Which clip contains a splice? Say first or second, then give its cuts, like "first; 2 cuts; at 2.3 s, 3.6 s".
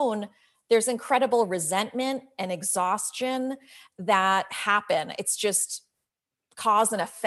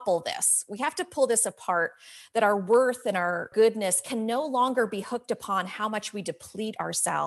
second; 1 cut; at 3.5 s